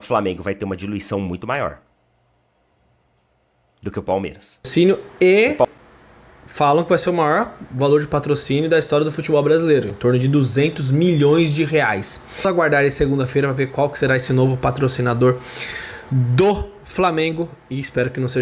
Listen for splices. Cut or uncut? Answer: cut